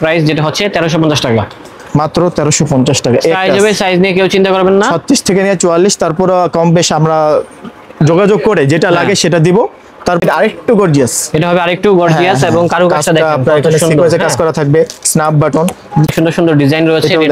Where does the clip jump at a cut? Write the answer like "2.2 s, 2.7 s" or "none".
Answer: 10.2 s, 16.1 s